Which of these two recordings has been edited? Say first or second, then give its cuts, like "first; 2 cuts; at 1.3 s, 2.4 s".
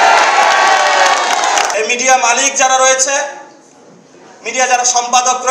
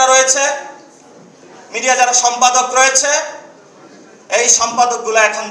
first; 1 cut; at 1.7 s